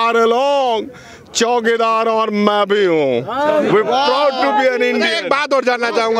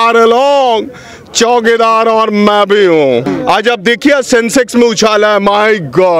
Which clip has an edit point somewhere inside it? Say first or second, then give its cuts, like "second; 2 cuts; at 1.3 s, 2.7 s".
second; 1 cut; at 3.3 s